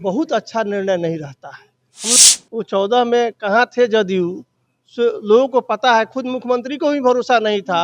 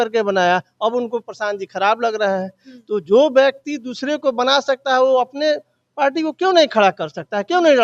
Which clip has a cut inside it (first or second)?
first